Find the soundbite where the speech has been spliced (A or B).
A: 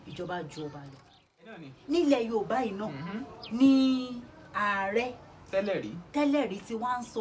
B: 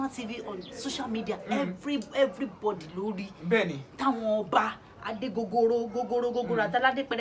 A